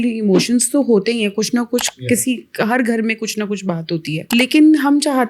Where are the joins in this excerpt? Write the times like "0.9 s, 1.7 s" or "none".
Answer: 4.2 s